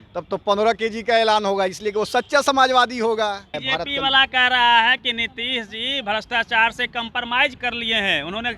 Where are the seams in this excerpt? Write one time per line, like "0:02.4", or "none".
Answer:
0:03.6
0:07.6